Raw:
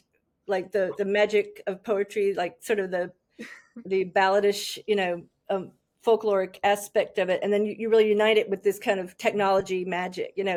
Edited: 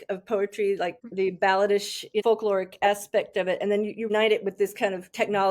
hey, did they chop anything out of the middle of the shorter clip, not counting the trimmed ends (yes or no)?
yes